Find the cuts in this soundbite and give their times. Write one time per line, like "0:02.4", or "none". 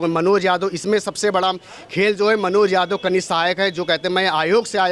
none